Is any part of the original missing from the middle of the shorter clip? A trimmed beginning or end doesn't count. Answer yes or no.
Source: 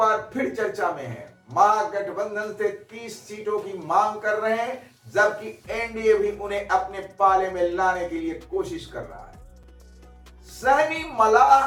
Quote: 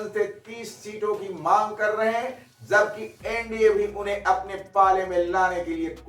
no